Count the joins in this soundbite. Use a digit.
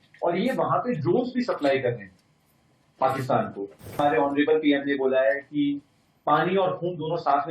1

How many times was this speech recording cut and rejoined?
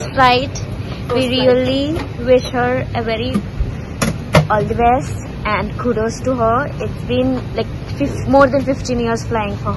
0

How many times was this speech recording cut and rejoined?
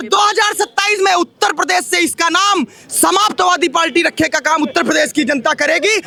0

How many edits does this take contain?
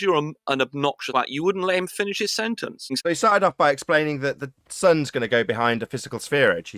2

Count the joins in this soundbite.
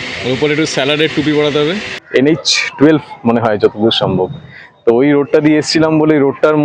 1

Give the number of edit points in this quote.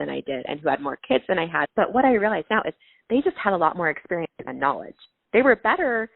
1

